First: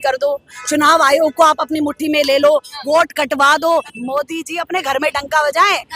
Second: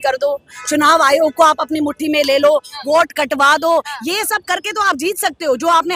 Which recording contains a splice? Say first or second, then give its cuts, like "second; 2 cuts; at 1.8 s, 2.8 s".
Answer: first; 1 cut; at 3.9 s